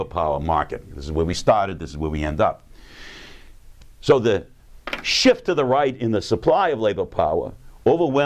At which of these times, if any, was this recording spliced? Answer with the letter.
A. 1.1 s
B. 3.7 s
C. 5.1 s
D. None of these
C